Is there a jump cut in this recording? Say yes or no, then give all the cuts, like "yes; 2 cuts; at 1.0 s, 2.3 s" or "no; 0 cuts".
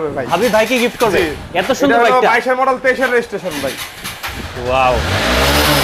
no; 0 cuts